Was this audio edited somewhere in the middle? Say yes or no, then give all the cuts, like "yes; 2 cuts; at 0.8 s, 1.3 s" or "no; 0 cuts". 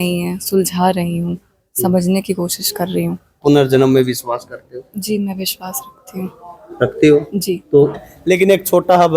yes; 2 cuts; at 3.4 s, 8.0 s